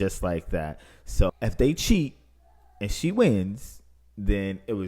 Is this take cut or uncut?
cut